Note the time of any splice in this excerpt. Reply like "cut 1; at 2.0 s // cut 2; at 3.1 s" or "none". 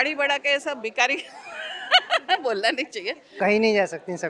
cut 1; at 3.4 s